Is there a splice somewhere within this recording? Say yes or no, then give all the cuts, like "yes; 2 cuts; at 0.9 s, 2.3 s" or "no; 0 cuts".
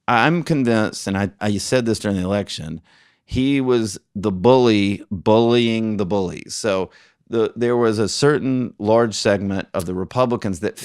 yes; 1 cut; at 1.3 s